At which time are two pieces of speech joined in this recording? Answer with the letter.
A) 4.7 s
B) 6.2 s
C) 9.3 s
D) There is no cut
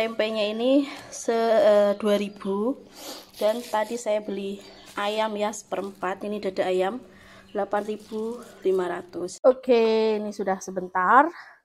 C